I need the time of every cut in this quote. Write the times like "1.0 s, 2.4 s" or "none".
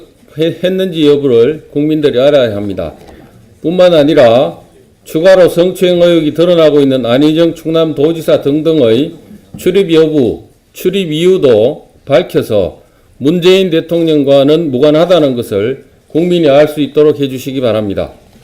15.5 s